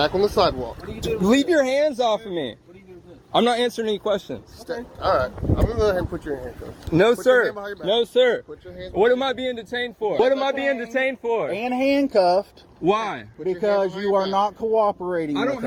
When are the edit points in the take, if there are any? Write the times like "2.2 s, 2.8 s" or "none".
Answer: none